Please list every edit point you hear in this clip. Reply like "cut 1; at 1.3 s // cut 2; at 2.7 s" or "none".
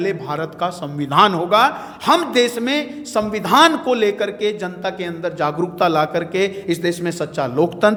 none